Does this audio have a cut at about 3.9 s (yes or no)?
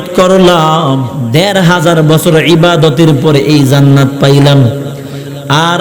no